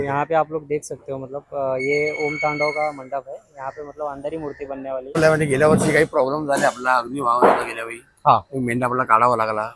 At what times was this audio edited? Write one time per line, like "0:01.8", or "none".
0:05.2